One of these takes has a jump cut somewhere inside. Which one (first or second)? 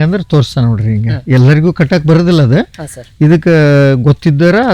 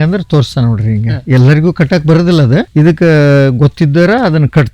second